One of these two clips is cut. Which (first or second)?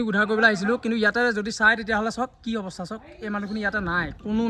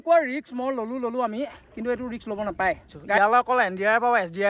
second